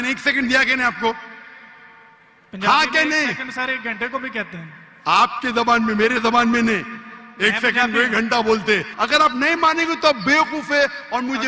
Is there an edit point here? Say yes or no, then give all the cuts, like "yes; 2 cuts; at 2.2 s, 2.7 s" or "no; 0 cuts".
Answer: yes; 1 cut; at 8.9 s